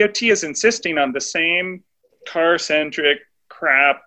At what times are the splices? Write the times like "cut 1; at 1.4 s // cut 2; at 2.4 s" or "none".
none

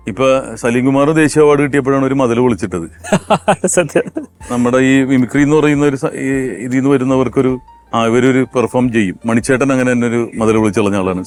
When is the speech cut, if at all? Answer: none

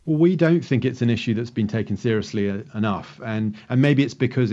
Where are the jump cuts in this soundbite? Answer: none

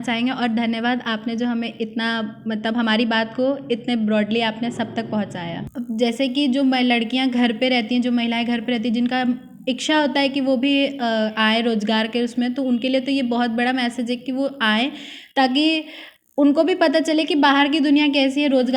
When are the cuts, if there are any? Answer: cut 1; at 5.7 s

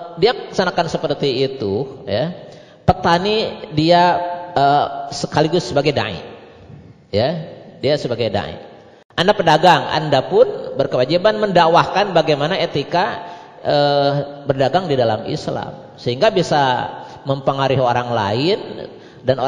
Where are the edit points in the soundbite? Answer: none

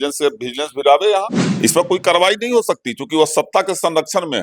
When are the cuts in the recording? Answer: cut 1; at 1.4 s

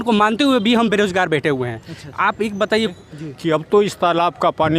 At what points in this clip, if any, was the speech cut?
cut 1; at 2.9 s

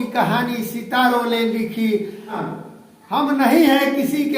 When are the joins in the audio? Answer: cut 1; at 2.4 s

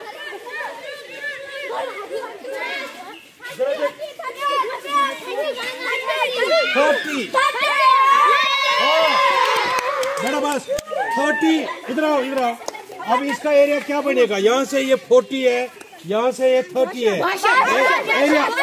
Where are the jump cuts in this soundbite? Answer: none

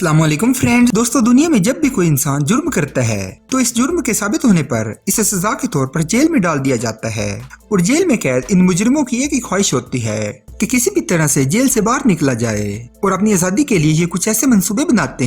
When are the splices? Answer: cut 1; at 0.9 s

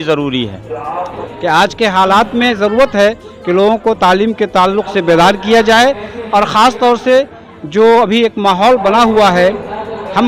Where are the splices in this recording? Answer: cut 1; at 1.2 s

